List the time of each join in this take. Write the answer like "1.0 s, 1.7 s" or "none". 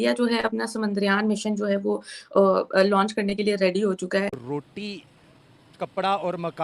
4.4 s